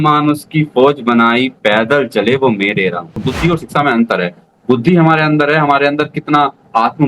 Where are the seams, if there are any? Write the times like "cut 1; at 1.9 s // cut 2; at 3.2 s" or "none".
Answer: cut 1; at 3.1 s